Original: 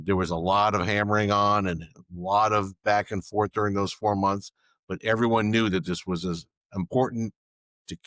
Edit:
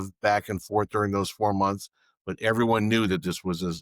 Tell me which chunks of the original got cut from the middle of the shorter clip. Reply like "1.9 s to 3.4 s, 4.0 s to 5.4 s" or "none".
none